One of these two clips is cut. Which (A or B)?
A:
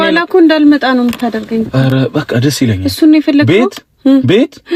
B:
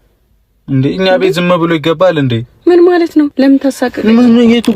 B